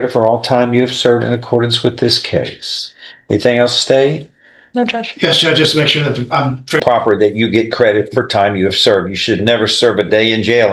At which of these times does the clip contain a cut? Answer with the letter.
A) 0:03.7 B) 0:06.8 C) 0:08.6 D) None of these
B